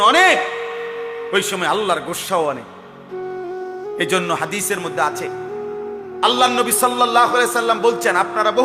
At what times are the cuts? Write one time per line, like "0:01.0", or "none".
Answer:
0:02.6
0:04.0